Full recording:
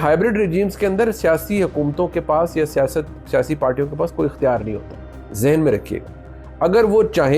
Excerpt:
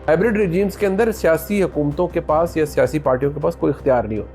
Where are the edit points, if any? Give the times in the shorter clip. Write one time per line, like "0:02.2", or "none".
0:02.7